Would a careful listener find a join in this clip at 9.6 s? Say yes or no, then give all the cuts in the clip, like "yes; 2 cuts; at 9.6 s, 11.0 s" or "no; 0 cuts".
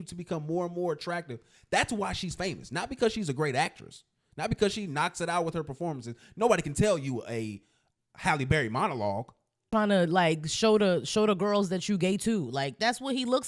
yes; 1 cut; at 9.6 s